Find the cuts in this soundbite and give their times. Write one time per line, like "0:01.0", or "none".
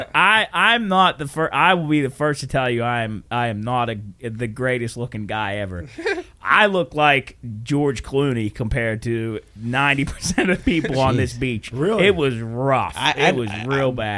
none